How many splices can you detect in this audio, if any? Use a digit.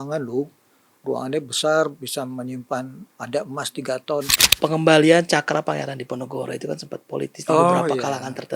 1